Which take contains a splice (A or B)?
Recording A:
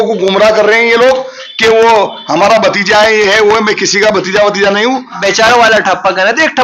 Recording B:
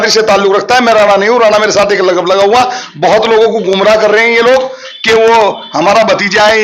A